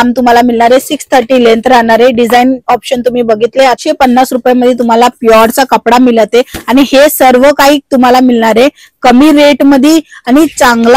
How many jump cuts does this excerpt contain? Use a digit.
1